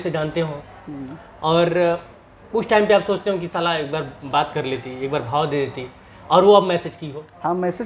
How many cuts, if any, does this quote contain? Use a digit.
0